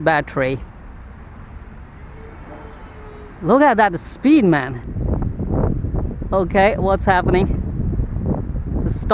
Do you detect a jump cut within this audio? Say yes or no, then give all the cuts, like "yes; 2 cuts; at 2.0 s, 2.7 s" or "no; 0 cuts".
yes; 1 cut; at 4.9 s